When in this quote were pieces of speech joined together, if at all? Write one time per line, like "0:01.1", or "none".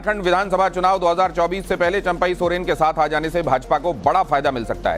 none